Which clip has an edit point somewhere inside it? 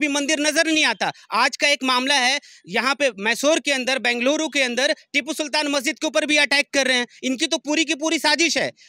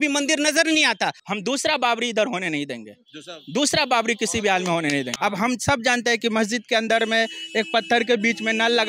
second; 2 cuts; at 1.2 s, 5.1 s

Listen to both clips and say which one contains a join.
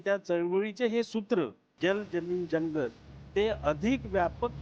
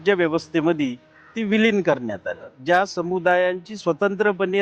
second; 1 cut; at 2.5 s

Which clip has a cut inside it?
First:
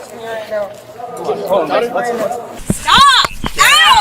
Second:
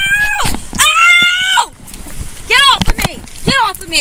first; 1 cut; at 2.6 s

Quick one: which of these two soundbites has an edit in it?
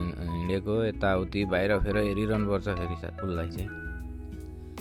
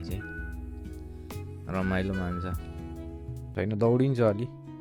second; 1 cut; at 3.5 s

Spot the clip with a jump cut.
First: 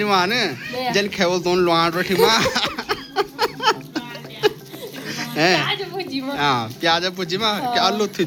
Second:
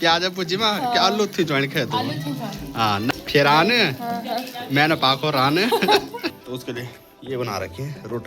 second; 2 cuts; at 3.1 s, 6.4 s

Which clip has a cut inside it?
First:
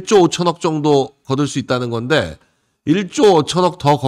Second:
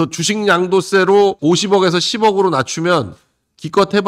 second; 1 cut; at 1.4 s

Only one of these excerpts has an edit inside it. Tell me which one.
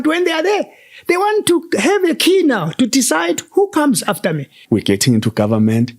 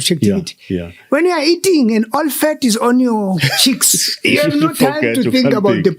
first; 1 cut; at 4.5 s

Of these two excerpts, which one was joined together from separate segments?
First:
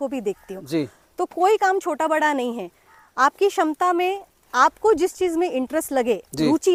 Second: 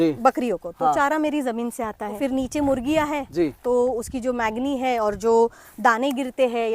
second; 1 cut; at 2.2 s

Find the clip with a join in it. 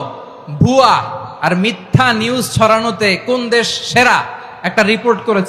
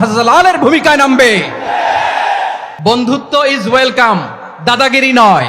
second; 1 cut; at 2.7 s

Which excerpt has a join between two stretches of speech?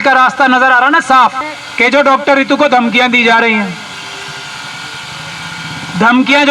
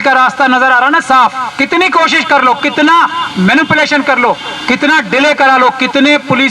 first; 1 cut; at 1.5 s

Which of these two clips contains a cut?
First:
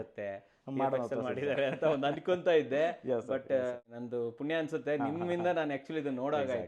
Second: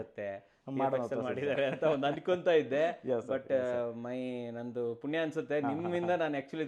first; 1 cut; at 3.8 s

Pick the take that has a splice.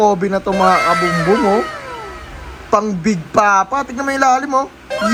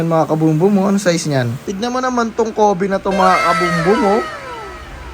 second; 1 cut; at 1.6 s

